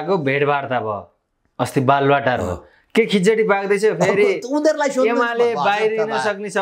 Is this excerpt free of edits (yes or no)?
yes